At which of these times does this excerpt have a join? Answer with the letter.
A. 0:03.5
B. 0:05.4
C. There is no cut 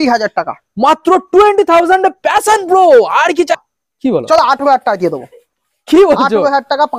A